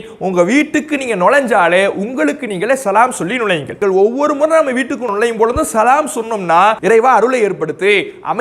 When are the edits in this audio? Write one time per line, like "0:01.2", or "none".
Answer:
0:03.7
0:05.1
0:06.8